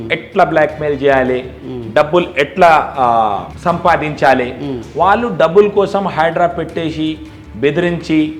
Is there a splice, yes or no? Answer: no